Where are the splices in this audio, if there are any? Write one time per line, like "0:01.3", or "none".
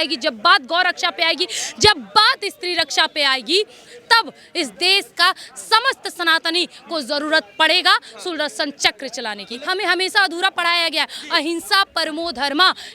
0:09.5